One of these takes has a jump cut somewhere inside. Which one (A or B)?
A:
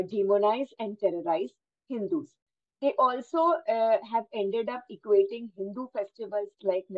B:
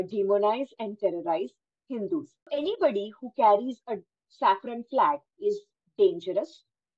B